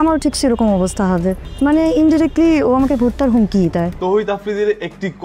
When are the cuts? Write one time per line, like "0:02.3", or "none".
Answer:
0:04.1